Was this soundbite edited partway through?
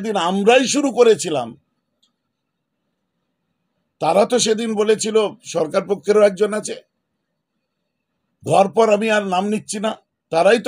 no; 0 cuts

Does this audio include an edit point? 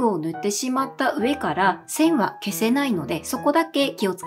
no; 0 cuts

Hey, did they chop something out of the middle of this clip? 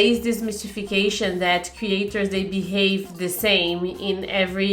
no; 0 cuts

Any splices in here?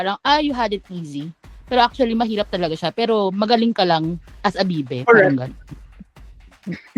no; 0 cuts

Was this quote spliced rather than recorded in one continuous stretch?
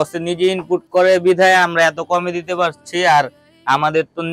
no; 0 cuts

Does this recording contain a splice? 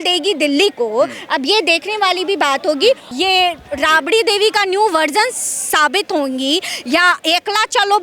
yes; 1 cut; at 3.1 s

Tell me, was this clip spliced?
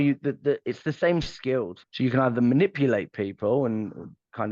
yes; 1 cut; at 1.8 s

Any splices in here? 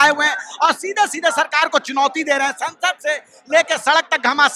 no; 0 cuts

